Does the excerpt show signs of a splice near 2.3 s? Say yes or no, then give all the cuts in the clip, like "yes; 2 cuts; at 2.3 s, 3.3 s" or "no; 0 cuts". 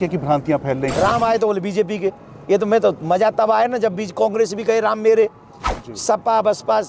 no; 1 cut; at 0.9 s